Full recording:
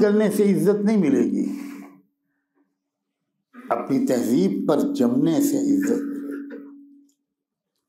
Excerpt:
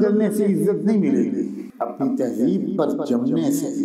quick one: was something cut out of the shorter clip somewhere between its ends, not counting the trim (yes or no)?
yes